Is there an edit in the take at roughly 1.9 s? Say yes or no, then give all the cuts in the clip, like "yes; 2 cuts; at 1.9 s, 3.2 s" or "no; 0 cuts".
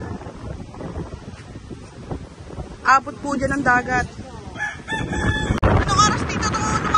no; 1 cut; at 5.6 s